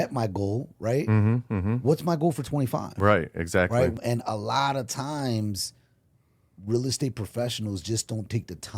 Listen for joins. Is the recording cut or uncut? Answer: cut